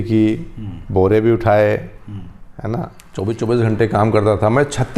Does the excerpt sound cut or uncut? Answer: cut